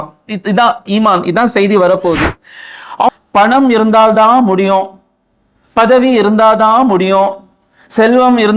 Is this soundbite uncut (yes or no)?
no